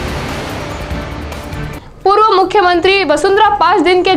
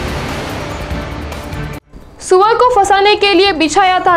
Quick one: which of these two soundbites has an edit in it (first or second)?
second